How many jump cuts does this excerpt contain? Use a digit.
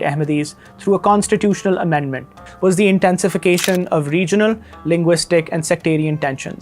1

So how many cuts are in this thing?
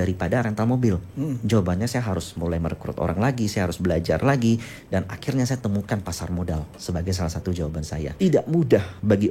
1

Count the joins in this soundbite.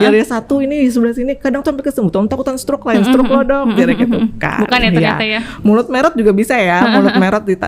0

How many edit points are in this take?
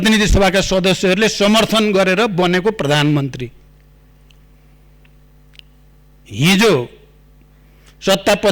0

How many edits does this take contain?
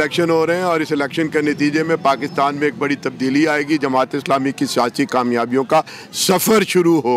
0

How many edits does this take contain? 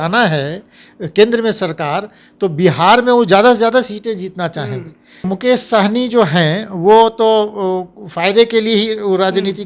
1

